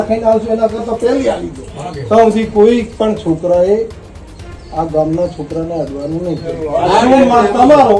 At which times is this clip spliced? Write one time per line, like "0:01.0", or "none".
0:01.8
0:06.5

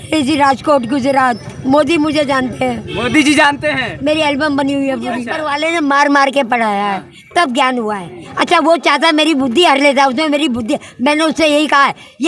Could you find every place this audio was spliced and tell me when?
0:01.5
0:05.4

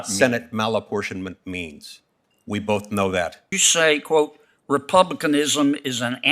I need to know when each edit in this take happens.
0:03.6

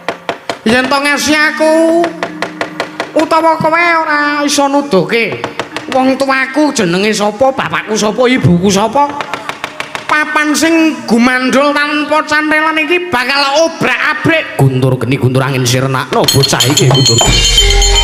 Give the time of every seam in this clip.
none

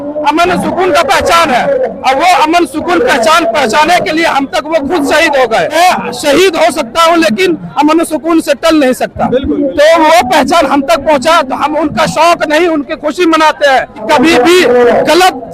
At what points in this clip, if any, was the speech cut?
0:05.7
0:14.0

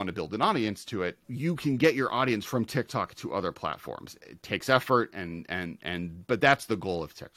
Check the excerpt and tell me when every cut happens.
0:01.2

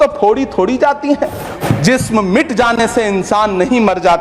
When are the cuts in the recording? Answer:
0:01.6

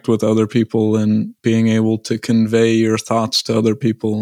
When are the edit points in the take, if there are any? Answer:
0:01.3

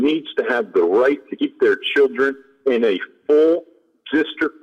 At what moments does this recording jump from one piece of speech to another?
none

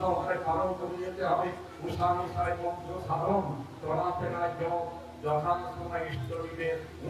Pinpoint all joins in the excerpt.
none

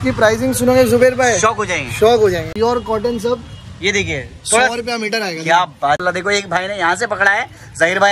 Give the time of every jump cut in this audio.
0:02.5
0:06.0

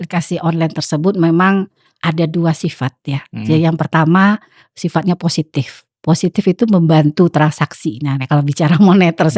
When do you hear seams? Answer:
none

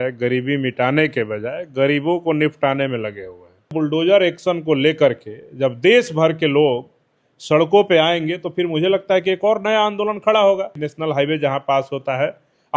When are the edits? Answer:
0:03.7
0:10.8

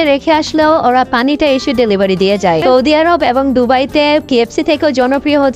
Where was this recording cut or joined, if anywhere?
0:02.6

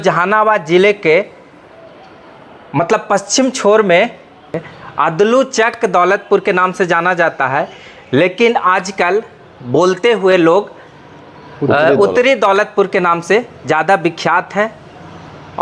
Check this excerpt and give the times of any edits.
none

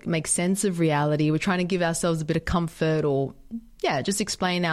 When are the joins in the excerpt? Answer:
none

